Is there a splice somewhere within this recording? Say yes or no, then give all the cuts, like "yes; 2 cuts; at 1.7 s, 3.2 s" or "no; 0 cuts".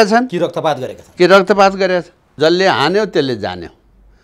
yes; 1 cut; at 2.4 s